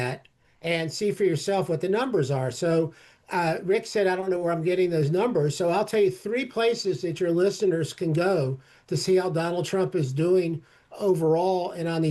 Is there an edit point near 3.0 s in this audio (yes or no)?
no